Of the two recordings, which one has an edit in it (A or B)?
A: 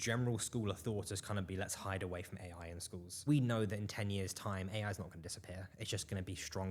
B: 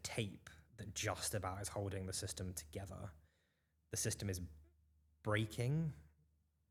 A